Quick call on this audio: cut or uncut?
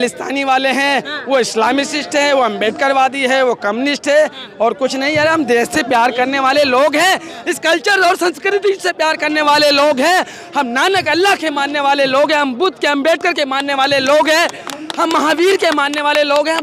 uncut